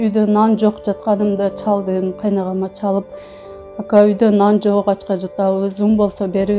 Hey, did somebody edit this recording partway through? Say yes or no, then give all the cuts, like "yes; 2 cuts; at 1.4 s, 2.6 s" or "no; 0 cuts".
no; 0 cuts